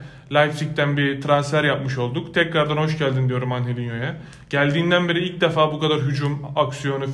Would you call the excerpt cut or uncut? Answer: uncut